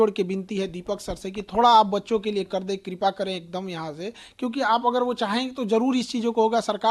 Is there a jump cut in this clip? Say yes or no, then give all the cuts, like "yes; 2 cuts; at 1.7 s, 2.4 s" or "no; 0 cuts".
no; 0 cuts